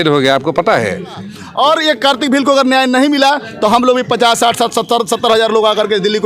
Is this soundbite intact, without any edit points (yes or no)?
no